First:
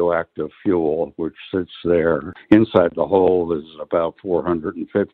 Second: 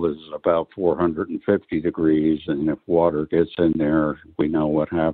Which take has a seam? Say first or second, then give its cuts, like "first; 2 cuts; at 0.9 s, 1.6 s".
first; 1 cut; at 2.3 s